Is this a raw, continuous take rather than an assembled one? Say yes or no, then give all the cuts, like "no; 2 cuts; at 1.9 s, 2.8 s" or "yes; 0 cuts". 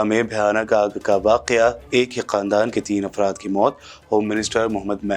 yes; 0 cuts